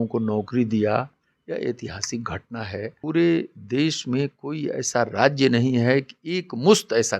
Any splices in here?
yes; 1 cut; at 3.0 s

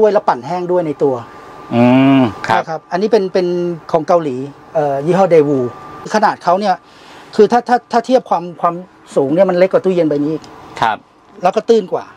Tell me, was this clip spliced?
no; 0 cuts

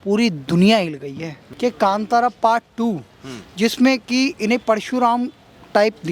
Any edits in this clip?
yes; 1 cut; at 1.4 s

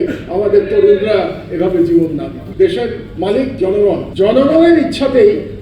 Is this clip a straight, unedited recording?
no; 2 cuts; at 2.4 s, 4.1 s

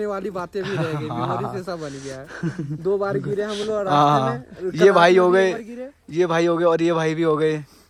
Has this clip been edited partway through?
no; 0 cuts

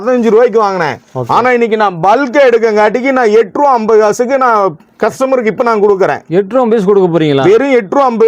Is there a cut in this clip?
no; 0 cuts

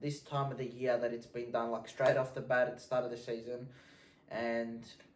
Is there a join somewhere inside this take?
no; 0 cuts

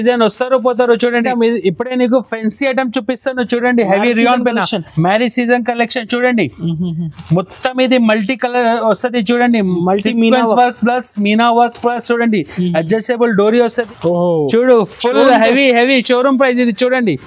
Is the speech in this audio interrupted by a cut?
yes; 2 cuts; at 1.2 s, 13.9 s

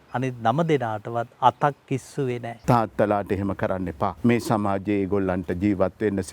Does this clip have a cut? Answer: yes; 2 cuts; at 2.5 s, 4.1 s

